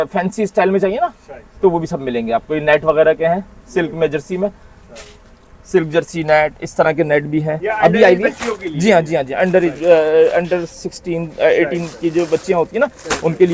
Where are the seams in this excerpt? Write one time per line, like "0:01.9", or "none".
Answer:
none